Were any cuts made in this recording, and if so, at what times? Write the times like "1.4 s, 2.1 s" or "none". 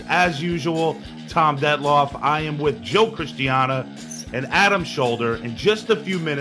2.5 s